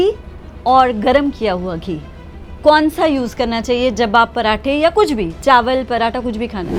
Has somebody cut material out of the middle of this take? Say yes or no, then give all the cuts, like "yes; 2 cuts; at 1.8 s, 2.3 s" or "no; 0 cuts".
no; 0 cuts